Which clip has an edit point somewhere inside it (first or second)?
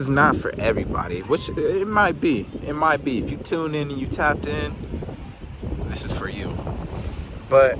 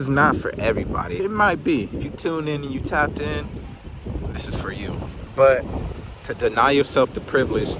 second